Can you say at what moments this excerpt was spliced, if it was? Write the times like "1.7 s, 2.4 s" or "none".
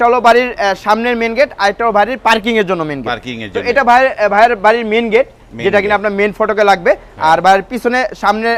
none